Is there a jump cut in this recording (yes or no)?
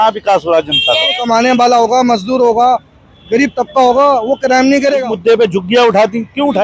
yes